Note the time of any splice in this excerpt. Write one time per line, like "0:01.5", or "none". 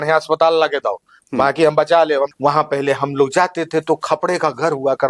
0:02.3